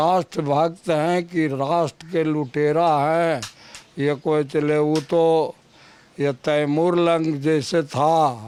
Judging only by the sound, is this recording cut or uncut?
uncut